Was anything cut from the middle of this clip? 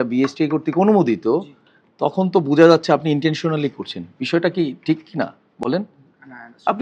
no; 0 cuts

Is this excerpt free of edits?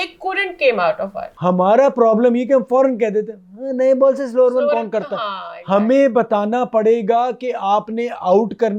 no; 1 cut; at 1.2 s

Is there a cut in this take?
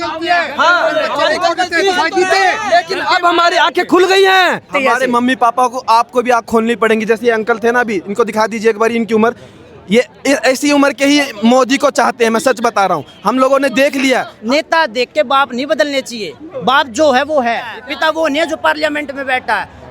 yes; 3 cuts; at 4.7 s, 14.3 s, 17.8 s

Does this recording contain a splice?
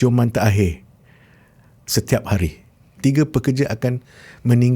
yes; 1 cut; at 3.0 s

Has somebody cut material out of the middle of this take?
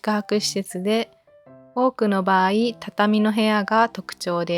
no; 0 cuts

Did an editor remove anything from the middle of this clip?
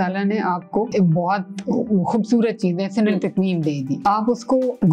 yes; 2 cuts; at 0.9 s, 4.1 s

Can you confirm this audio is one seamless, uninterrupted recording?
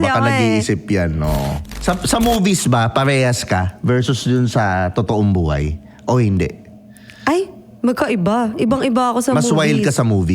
no; 1 cut; at 1.6 s

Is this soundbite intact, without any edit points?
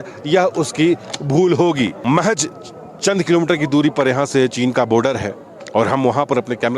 no; 1 cut; at 2.0 s

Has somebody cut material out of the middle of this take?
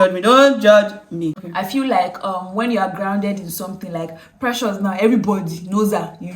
yes; 1 cut; at 1.4 s

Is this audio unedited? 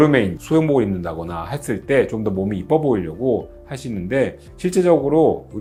yes; 0 cuts

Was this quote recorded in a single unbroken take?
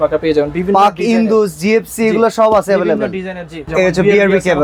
no; 1 cut; at 3.6 s

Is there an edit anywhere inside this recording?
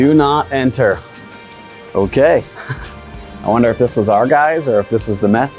no; 0 cuts

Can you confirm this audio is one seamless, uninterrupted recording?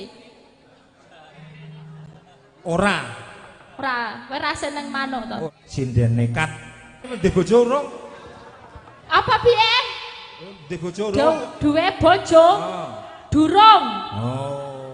no; 2 cuts; at 5.5 s, 7.1 s

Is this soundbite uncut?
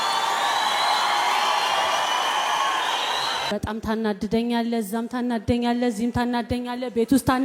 no; 1 cut; at 3.5 s

